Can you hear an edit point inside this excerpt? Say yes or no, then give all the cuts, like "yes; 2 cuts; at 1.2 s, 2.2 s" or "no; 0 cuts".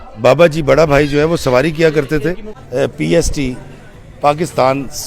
yes; 1 cut; at 2.5 s